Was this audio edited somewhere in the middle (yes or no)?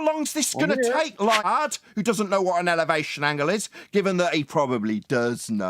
yes